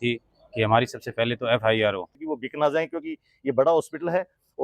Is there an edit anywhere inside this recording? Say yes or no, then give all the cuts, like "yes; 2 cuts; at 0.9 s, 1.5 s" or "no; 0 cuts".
yes; 1 cut; at 2.2 s